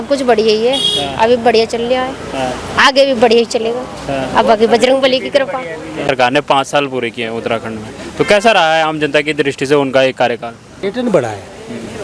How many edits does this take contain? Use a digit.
0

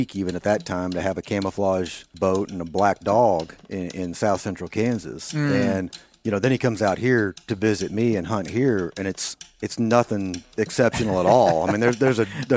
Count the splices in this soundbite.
0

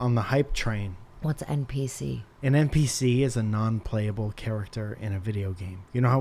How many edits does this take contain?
2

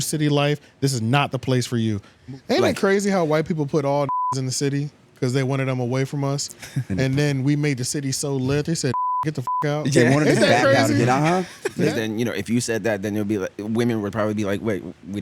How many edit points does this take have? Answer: 2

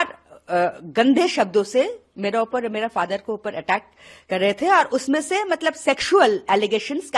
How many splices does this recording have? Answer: 0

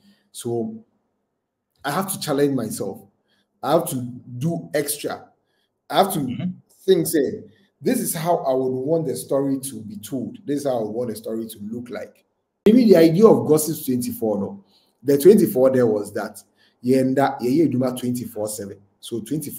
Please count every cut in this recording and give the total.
1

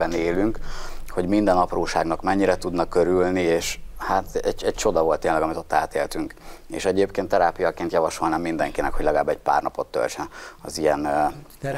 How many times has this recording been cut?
0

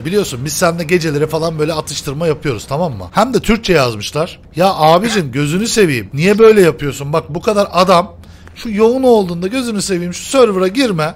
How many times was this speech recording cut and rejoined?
3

